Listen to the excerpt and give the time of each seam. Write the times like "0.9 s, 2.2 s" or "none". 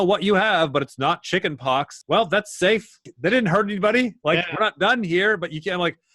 2.0 s, 3.1 s